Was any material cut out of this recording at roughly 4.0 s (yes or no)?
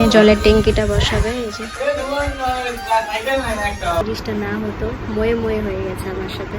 yes